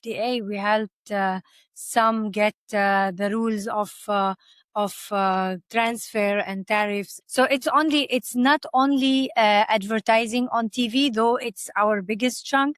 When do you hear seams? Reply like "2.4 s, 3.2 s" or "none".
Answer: 7.2 s